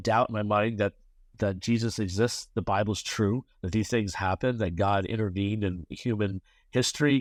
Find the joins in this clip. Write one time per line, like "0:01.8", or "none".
none

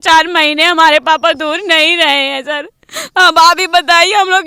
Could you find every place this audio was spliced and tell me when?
none

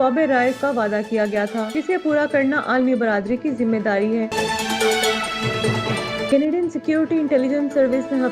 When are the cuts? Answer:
0:04.3
0:06.2

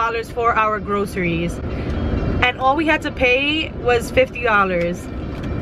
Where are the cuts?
none

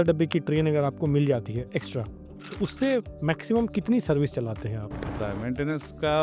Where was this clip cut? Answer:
0:05.2

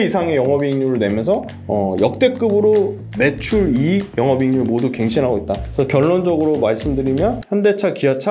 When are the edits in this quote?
0:01.5
0:03.0
0:04.1
0:05.6
0:07.4

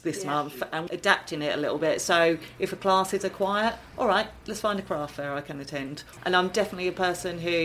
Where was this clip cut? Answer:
0:00.8
0:06.1

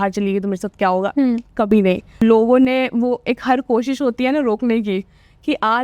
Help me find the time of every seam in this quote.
0:02.2

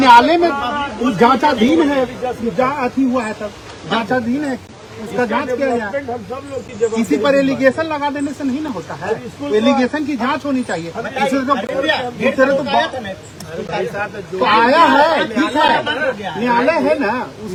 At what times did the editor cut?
none

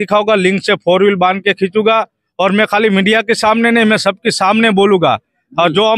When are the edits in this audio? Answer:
none

